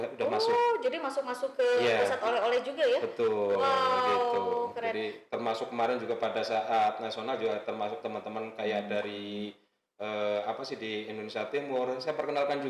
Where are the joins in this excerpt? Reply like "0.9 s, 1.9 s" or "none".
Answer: none